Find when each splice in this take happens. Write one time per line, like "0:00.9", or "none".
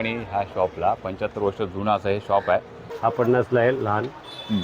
0:02.8

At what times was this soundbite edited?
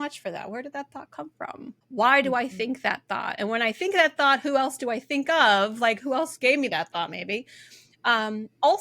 0:01.8

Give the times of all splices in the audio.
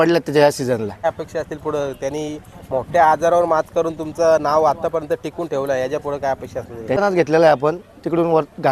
0:01.0
0:06.9

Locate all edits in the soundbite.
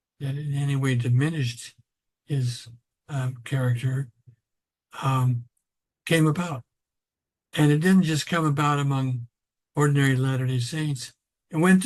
none

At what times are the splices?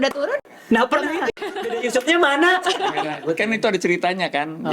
0:01.5
0:03.1

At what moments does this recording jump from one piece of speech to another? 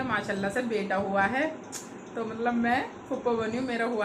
none

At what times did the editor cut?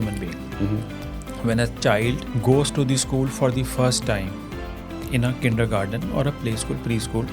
0:02.3

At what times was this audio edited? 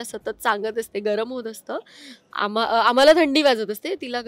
none

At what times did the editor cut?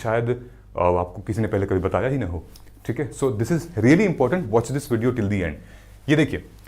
none

